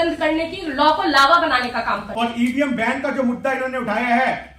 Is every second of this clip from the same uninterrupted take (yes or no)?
no